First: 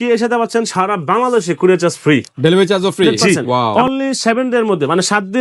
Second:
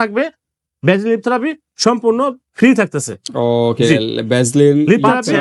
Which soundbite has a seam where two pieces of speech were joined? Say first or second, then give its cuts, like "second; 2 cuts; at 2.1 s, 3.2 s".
first; 1 cut; at 3.7 s